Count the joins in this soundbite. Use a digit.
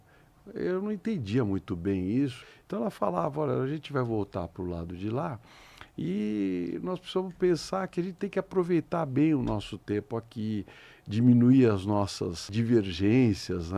2